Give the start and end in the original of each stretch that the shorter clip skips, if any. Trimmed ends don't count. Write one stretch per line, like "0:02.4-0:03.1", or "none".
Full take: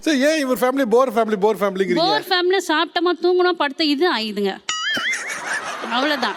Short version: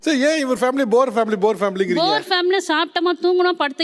none

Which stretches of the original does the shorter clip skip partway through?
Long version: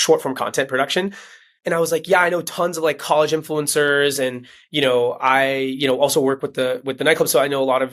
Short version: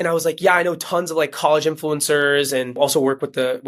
0:04.4-0:06.0

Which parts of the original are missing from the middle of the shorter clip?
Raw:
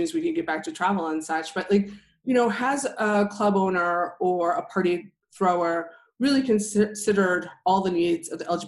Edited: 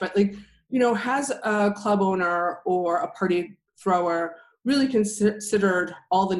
none

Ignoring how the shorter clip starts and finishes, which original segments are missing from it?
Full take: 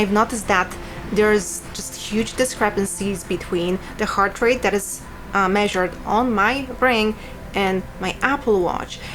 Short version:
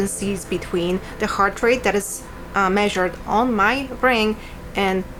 none

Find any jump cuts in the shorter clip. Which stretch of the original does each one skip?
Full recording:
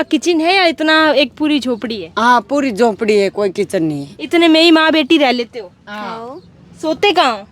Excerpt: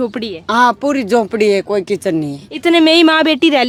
none

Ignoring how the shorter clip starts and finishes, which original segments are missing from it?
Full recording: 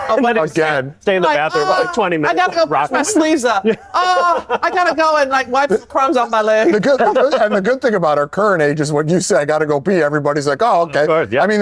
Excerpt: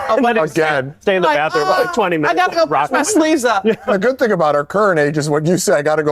0:03.9-0:07.5

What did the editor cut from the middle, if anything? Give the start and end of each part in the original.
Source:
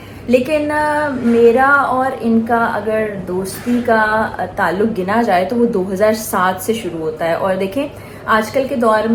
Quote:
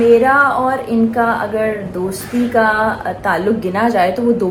none

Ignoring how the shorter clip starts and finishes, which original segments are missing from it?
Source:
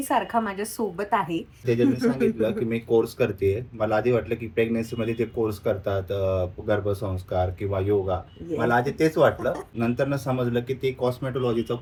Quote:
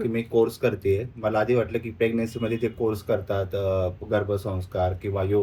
none

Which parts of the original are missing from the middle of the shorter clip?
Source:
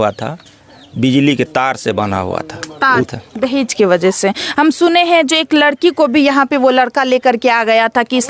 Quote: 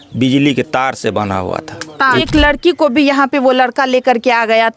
0:03.1-0:05.4

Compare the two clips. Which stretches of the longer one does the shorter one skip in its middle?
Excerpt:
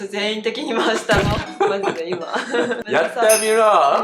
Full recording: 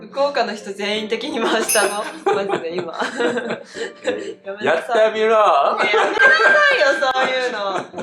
0:03.5-0:04.5

